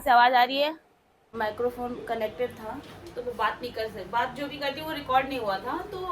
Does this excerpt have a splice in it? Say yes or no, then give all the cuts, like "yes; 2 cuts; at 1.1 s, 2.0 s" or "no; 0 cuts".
yes; 1 cut; at 1.2 s